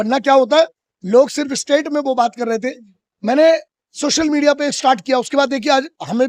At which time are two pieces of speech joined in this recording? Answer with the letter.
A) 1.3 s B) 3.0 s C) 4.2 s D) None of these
D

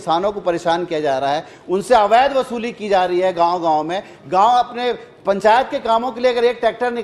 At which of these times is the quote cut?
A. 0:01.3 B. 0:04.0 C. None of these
C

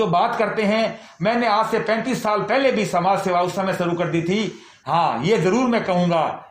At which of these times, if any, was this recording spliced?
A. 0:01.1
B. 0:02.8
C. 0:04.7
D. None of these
C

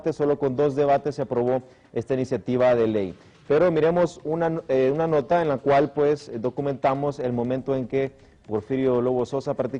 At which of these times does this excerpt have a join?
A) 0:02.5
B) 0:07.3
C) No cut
B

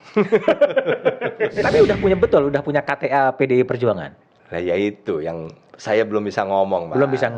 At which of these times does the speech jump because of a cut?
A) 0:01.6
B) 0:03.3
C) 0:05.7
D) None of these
A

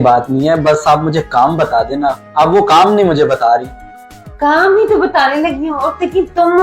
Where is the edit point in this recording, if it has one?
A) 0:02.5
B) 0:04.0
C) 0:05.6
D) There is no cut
D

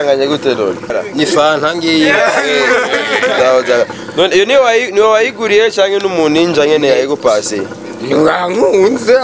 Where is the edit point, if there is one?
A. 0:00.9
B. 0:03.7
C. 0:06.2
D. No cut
A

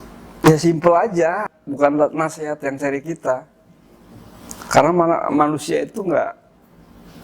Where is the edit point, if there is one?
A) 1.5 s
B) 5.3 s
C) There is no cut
A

